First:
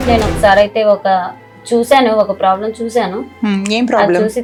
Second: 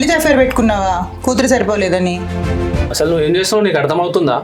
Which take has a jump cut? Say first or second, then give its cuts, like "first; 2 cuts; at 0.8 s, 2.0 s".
second; 1 cut; at 2.7 s